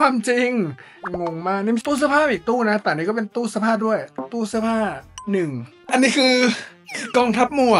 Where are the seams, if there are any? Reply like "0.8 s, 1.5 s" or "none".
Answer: 1.0 s, 1.8 s, 5.8 s